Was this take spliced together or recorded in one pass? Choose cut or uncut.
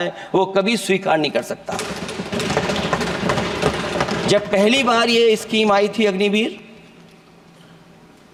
uncut